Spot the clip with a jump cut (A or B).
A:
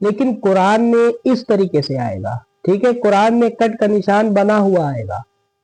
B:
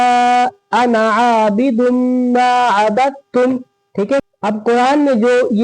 B